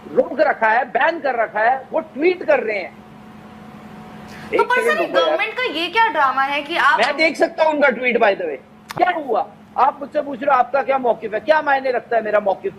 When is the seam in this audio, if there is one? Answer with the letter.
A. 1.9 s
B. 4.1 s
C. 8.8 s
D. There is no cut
C